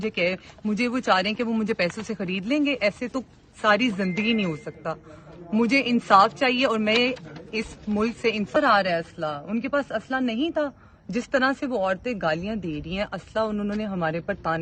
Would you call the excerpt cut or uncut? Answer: cut